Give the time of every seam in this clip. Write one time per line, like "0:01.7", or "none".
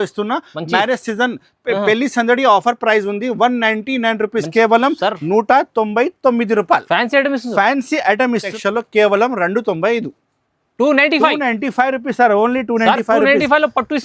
0:08.5